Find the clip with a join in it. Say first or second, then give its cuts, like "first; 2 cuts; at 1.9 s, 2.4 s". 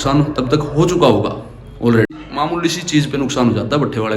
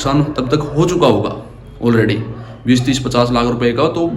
first; 1 cut; at 2.3 s